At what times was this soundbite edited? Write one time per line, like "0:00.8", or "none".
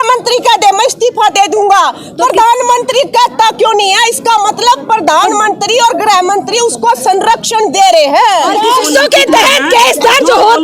0:08.6